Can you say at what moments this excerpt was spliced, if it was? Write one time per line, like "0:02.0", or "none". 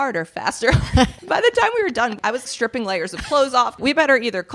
0:01.2
0:02.4
0:03.7